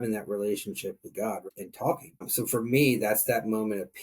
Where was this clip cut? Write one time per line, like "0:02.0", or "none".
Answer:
0:01.4
0:02.3